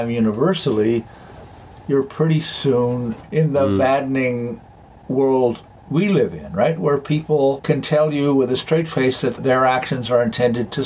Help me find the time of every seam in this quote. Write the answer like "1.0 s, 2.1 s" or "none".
3.2 s, 7.6 s